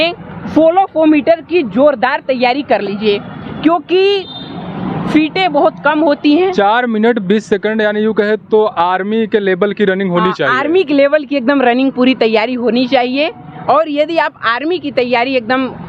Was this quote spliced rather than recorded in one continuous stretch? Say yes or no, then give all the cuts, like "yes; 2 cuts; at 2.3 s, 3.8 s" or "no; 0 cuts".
no; 0 cuts